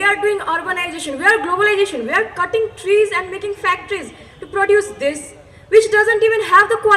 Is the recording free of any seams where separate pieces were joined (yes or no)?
yes